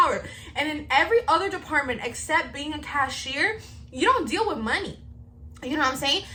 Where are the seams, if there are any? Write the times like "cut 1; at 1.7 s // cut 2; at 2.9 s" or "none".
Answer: none